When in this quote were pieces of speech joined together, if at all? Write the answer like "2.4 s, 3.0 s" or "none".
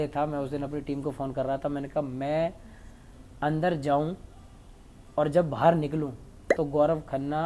none